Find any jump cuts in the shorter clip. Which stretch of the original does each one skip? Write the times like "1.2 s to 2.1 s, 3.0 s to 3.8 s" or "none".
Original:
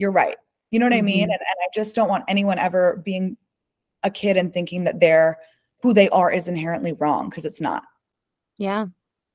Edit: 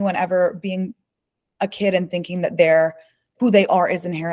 none